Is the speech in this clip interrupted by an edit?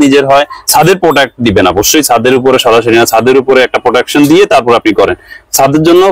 no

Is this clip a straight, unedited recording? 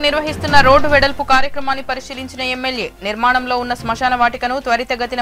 yes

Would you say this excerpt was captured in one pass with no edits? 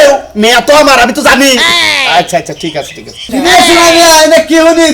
no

